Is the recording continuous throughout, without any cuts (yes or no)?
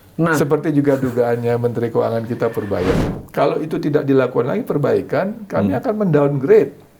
no